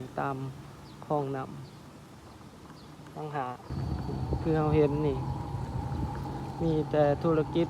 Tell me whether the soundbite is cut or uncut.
cut